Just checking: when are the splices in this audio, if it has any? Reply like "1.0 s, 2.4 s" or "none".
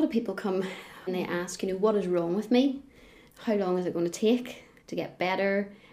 1.0 s